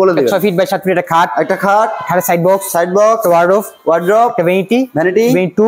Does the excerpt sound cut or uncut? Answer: uncut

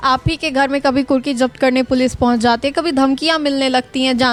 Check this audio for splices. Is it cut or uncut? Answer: uncut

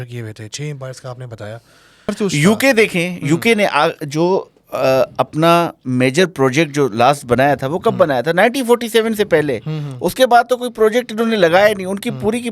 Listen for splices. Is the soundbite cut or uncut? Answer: cut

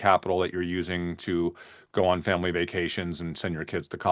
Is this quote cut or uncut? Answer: uncut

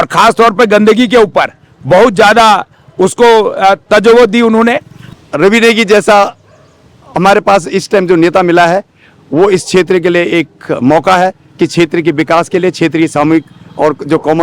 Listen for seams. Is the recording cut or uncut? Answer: cut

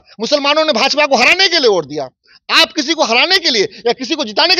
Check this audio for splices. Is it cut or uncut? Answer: uncut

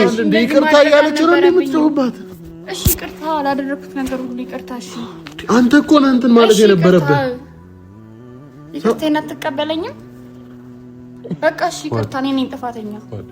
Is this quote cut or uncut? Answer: cut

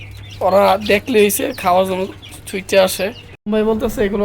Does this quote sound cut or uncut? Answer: cut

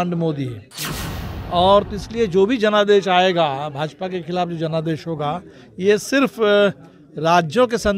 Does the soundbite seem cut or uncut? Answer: uncut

